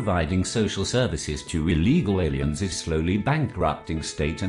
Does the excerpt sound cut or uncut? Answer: uncut